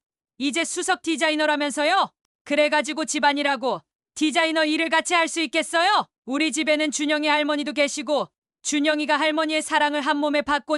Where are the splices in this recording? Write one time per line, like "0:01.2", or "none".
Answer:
0:02.2